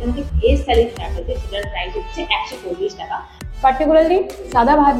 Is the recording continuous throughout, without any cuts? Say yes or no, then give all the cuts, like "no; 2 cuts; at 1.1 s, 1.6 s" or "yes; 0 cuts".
no; 1 cut; at 3.3 s